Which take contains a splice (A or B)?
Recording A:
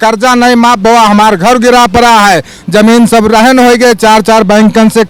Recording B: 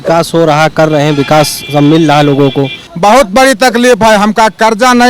B